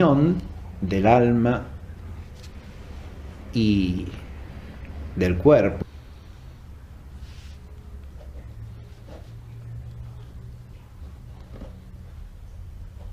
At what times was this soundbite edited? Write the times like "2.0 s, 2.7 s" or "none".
none

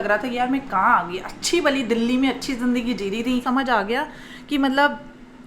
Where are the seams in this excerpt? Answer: 3.4 s

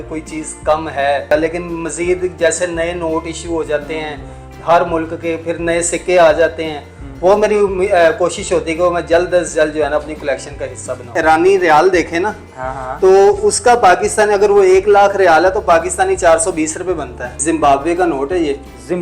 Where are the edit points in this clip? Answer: 1.3 s, 11.1 s, 17.3 s

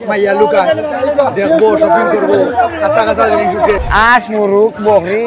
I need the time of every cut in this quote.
3.8 s

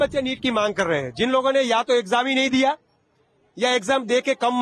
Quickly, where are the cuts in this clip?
none

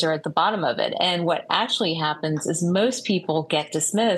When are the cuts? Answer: none

